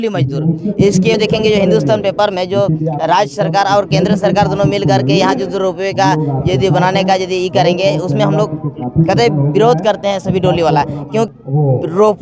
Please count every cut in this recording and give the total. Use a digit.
2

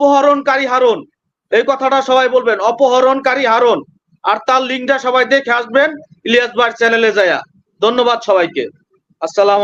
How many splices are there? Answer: 0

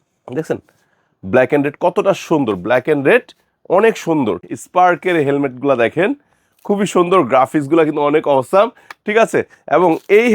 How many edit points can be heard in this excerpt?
1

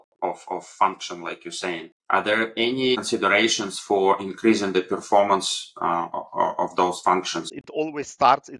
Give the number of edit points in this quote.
3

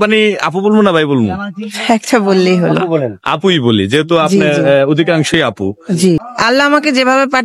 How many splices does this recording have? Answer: 1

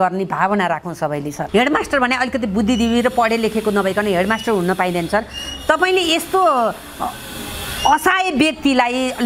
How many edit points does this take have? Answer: 1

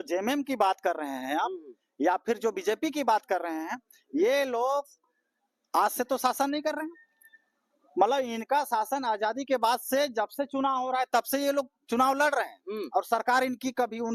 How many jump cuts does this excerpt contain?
0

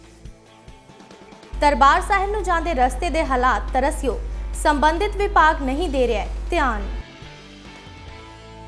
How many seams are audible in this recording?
1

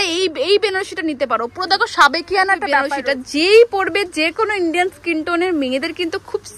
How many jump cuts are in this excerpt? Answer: 1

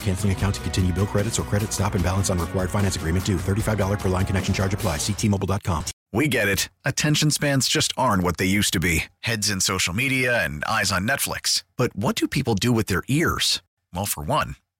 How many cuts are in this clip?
1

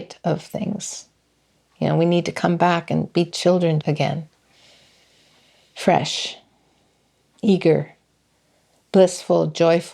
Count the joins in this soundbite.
1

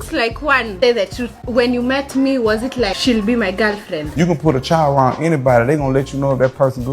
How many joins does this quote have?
3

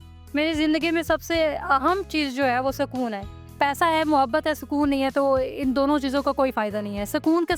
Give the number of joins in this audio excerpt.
1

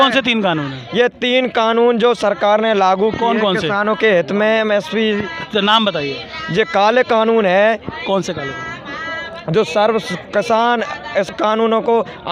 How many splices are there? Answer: 0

